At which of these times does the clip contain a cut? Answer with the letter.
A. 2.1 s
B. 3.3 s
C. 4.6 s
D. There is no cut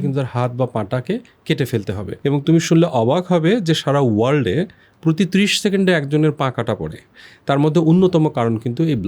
A